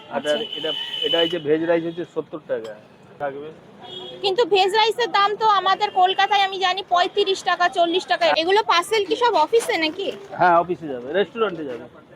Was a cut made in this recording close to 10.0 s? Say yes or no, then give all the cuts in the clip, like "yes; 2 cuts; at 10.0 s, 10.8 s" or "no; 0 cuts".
no; 2 cuts; at 3.1 s, 8.3 s